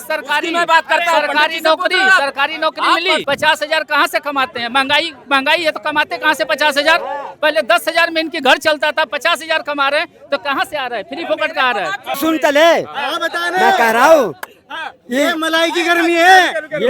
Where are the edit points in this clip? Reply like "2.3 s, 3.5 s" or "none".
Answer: 3.2 s, 12.2 s